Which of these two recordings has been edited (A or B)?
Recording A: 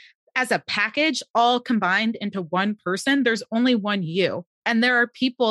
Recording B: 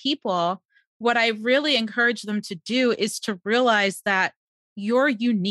A